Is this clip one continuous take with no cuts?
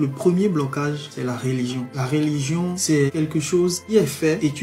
no; 1 cut; at 2.8 s

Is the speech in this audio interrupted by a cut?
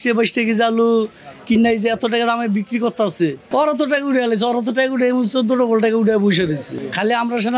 yes; 1 cut; at 3.4 s

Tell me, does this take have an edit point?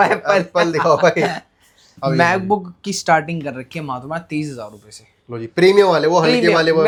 no; 0 cuts

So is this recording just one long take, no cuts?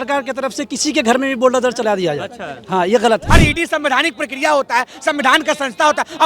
no; 1 cut; at 3.2 s

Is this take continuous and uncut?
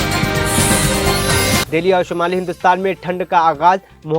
yes; 0 cuts

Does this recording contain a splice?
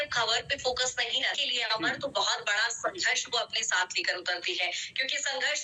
yes; 1 cut; at 1.4 s

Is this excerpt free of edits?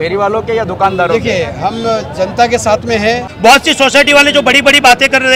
no; 1 cut; at 3.3 s

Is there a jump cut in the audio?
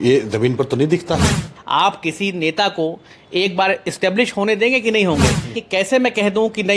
yes; 2 cuts; at 1.5 s, 5.6 s

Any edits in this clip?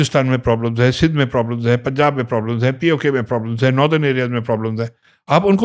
no; 0 cuts

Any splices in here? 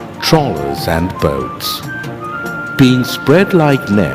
no; 0 cuts

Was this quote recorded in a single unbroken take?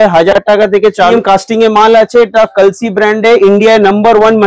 no; 1 cut; at 1.1 s

